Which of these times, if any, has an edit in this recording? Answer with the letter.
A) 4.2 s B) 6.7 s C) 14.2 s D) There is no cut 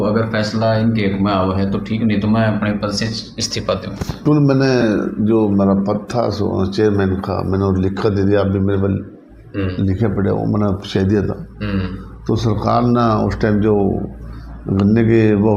A